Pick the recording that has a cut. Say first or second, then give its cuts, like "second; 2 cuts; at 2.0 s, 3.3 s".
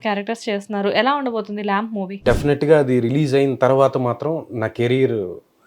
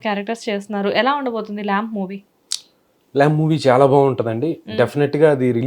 first; 1 cut; at 2.1 s